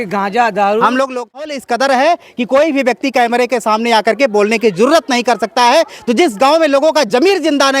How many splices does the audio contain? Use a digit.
1